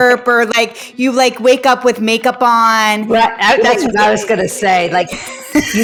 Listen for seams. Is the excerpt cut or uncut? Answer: uncut